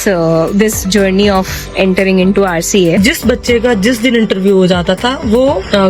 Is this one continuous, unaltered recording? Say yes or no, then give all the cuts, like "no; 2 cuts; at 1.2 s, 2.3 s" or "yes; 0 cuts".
no; 1 cut; at 3.0 s